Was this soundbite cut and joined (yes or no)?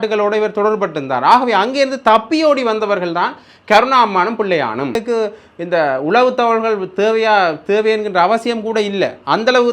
yes